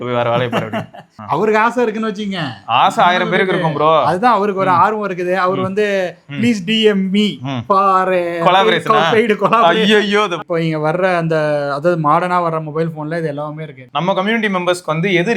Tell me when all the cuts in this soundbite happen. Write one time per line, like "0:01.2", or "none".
0:01.1
0:10.4
0:13.8